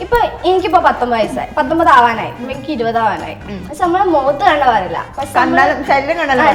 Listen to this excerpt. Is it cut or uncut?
uncut